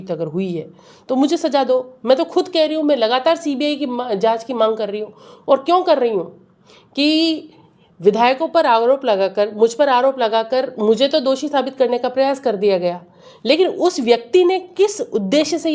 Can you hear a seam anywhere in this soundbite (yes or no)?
no